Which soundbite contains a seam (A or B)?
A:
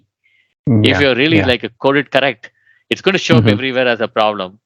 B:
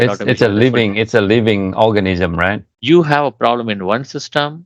B